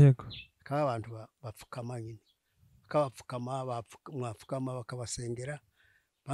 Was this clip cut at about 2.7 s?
no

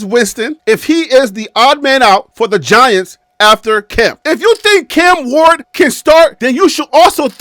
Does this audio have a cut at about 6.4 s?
no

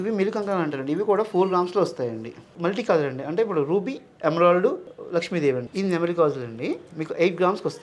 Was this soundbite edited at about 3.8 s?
no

